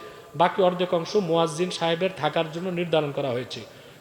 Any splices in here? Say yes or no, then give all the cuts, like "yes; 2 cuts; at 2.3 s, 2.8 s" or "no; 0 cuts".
no; 0 cuts